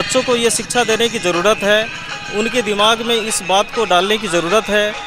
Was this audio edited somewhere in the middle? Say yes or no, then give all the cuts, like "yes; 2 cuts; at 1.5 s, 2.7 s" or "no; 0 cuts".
no; 0 cuts